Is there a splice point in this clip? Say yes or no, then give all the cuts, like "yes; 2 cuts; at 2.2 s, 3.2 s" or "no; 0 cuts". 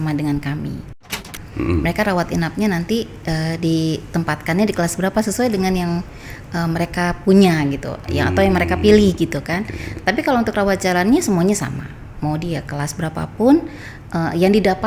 yes; 1 cut; at 1.2 s